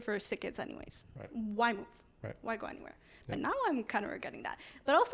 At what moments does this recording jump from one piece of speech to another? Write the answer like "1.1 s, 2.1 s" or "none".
none

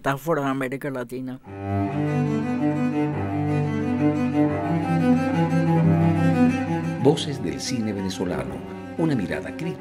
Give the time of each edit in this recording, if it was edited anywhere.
1.5 s

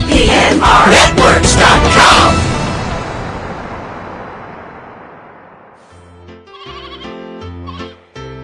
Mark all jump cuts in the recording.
6.1 s

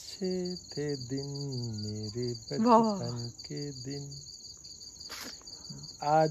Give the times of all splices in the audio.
none

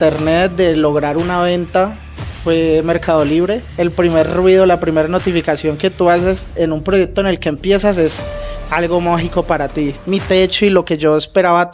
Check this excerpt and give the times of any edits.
3.8 s, 10.0 s

